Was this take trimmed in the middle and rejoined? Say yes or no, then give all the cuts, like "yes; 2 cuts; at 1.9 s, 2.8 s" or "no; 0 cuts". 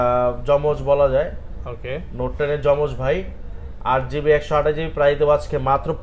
no; 0 cuts